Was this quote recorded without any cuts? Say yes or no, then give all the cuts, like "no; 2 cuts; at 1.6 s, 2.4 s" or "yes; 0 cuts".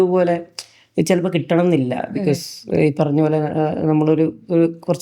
yes; 0 cuts